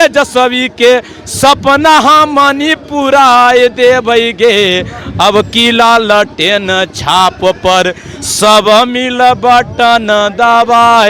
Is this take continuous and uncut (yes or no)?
yes